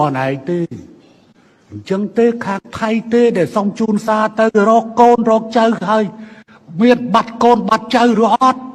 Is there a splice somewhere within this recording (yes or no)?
no